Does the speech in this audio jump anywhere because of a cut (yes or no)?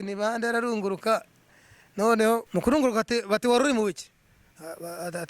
yes